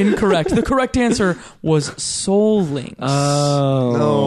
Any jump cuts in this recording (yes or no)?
no